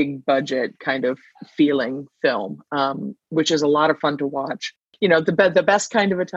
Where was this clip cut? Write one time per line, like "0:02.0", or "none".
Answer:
0:04.8